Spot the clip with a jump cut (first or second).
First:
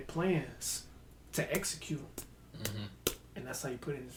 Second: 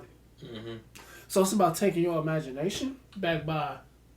second